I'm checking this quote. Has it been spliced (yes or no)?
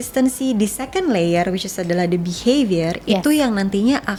no